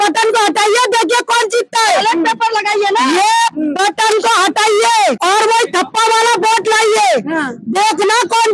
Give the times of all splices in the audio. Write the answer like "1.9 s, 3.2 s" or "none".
5.2 s